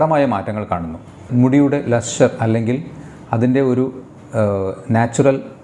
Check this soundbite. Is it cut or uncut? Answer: cut